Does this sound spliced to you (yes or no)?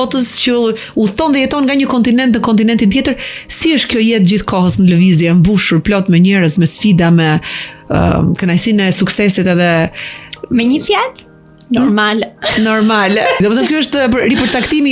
no